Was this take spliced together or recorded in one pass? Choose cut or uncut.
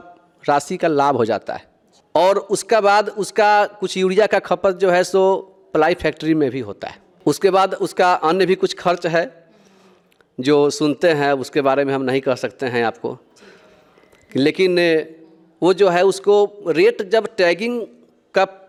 uncut